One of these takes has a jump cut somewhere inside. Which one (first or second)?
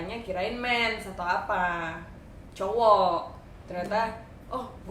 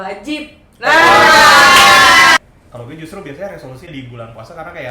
second